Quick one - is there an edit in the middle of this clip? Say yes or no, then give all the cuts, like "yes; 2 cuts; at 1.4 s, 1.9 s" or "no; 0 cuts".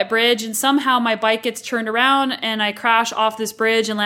no; 0 cuts